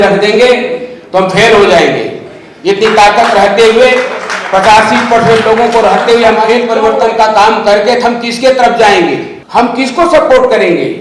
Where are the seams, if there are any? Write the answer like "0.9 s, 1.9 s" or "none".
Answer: 6.6 s, 9.3 s